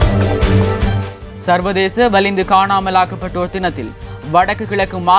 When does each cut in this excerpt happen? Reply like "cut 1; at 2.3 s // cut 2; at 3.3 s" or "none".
cut 1; at 1.1 s